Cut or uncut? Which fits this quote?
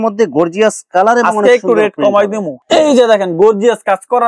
cut